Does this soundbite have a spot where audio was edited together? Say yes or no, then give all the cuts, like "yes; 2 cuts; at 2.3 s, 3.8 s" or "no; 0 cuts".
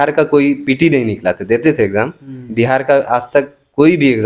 no; 0 cuts